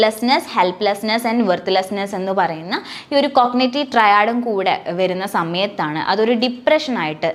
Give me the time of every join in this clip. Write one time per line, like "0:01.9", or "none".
none

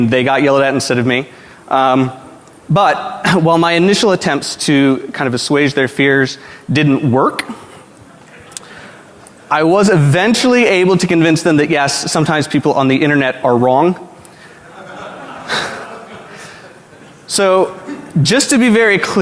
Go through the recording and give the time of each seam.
0:09.2

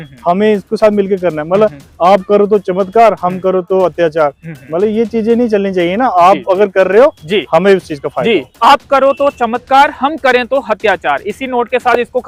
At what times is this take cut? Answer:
none

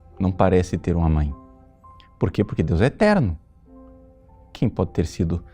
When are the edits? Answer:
0:03.7

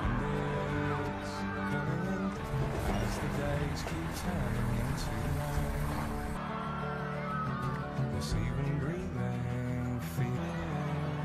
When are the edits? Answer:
0:02.4

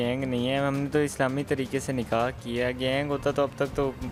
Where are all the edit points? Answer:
none

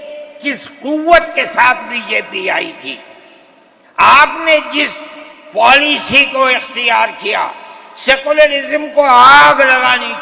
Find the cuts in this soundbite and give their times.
none

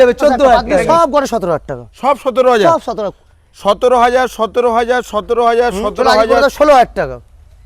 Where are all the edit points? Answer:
0:00.9
0:06.4

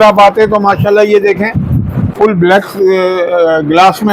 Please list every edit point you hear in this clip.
0:02.1

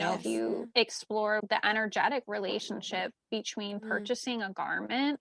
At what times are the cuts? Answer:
0:01.4

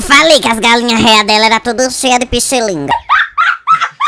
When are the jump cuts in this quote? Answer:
none

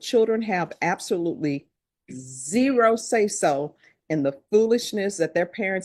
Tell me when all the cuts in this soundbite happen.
none

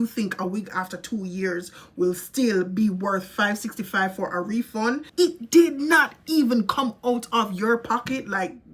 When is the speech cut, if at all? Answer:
0:05.1

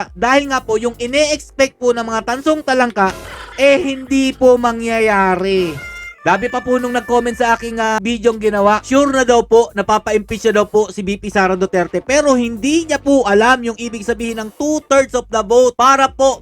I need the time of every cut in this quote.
none

